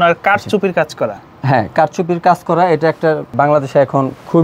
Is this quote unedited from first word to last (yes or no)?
yes